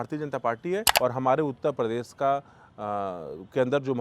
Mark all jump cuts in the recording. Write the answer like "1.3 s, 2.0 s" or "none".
0.9 s